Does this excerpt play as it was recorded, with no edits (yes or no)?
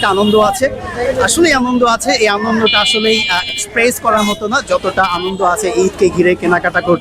yes